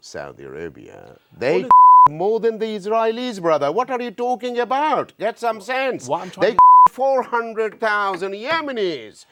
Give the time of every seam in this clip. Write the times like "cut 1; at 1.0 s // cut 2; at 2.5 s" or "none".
none